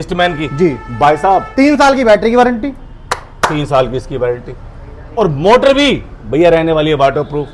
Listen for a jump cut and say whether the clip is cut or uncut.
uncut